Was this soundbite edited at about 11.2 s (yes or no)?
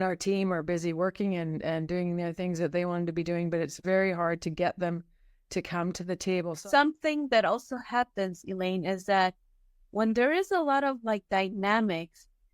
no